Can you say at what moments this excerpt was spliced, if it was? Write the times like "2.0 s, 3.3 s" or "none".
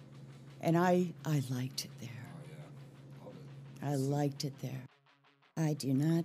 5.2 s